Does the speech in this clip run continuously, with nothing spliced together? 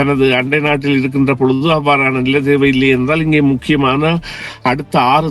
yes; 0 cuts

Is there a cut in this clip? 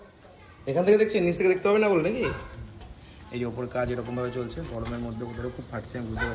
no; 0 cuts

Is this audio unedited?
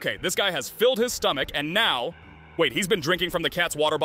yes; 0 cuts

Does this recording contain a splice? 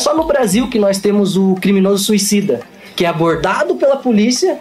no; 0 cuts

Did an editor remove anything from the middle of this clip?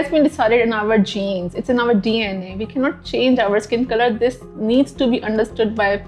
no; 0 cuts

